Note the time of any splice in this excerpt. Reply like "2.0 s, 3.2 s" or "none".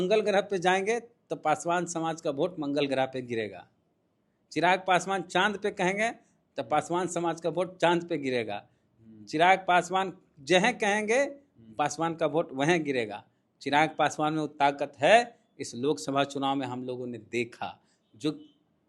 none